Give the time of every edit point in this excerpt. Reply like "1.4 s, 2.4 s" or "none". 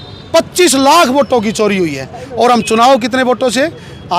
none